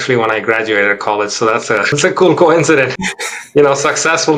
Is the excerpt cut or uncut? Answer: uncut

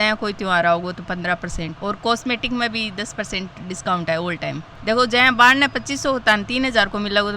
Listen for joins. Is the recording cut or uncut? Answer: cut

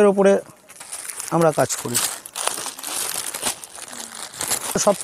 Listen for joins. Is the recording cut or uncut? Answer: uncut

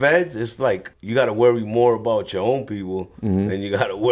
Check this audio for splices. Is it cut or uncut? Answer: cut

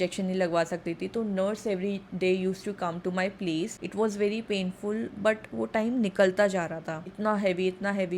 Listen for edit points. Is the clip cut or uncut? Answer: cut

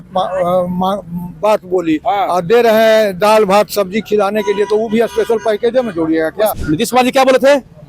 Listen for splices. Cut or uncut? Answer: cut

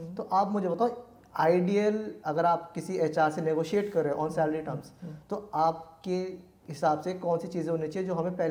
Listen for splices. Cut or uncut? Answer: uncut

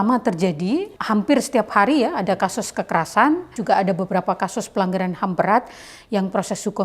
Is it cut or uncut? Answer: cut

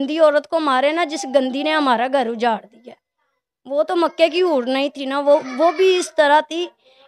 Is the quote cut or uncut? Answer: uncut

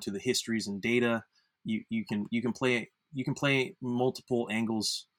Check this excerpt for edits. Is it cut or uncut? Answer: uncut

